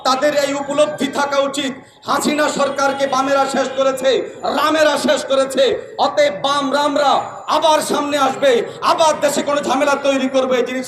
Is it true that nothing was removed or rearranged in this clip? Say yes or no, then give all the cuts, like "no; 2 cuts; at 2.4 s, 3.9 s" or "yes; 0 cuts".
yes; 0 cuts